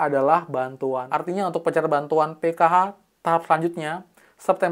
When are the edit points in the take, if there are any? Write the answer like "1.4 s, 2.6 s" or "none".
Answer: 1.1 s